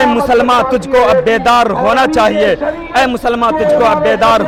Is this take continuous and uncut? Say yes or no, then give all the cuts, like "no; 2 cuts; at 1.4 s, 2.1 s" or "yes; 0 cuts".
yes; 0 cuts